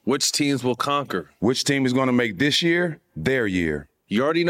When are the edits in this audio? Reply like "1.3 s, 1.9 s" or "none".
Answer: 1.3 s